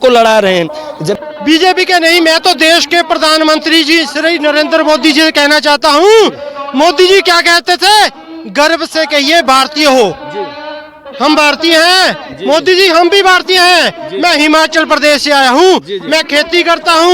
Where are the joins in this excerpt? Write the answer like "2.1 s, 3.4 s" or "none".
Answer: 1.1 s